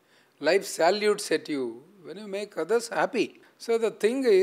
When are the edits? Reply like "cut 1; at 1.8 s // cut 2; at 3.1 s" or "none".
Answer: cut 1; at 3.5 s